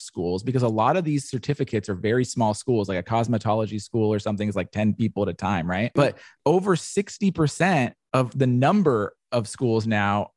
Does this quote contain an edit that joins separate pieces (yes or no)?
yes